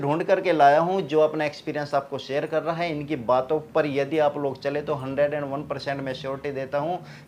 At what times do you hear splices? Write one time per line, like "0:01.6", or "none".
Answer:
none